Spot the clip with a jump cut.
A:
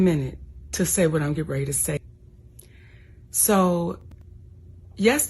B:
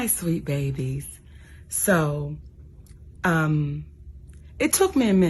A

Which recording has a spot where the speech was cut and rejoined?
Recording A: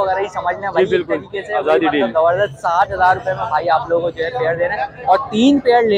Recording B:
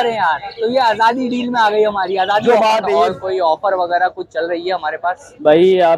B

